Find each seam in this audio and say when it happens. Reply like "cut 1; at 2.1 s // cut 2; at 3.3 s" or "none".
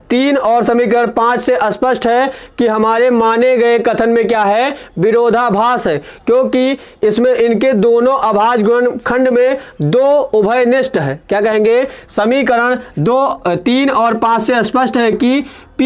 none